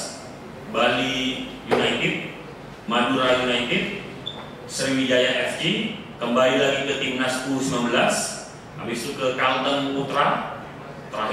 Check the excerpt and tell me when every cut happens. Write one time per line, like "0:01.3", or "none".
none